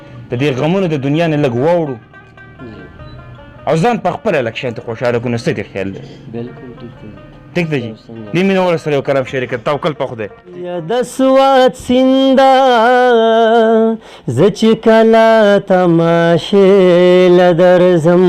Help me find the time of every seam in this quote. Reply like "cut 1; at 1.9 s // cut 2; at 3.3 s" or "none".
cut 1; at 10.9 s